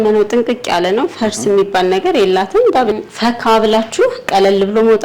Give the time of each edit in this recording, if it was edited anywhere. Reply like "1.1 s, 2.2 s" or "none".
2.9 s